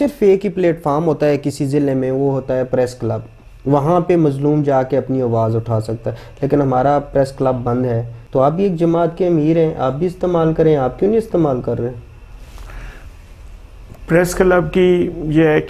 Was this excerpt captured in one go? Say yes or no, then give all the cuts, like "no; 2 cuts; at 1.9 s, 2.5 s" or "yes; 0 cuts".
no; 1 cut; at 8.2 s